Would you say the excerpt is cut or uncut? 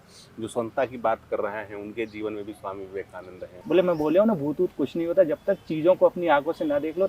cut